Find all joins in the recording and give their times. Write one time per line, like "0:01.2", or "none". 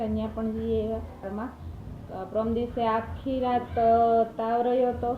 0:01.2